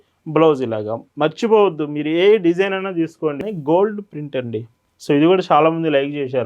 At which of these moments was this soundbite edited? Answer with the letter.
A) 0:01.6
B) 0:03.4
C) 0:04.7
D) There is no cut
B